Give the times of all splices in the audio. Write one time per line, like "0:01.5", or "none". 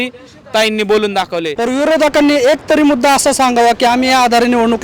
0:01.5